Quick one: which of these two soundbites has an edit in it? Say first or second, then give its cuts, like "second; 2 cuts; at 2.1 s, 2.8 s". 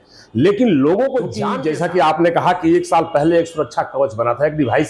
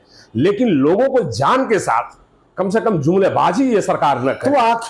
first; 1 cut; at 1.4 s